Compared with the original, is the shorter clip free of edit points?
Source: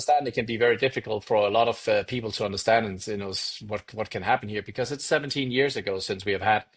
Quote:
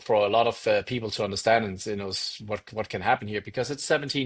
yes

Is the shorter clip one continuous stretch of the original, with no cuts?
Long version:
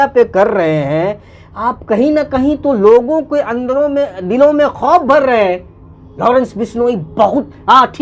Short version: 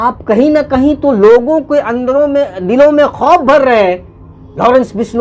yes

